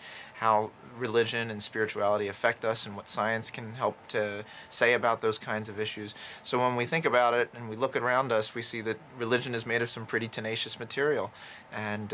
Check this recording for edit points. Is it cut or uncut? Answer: uncut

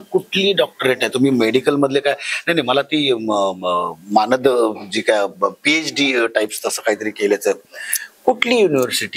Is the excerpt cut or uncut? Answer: uncut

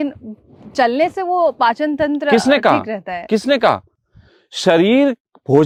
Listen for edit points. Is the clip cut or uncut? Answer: uncut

